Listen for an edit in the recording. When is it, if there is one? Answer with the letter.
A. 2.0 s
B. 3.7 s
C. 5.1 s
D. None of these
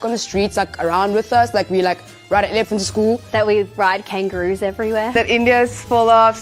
C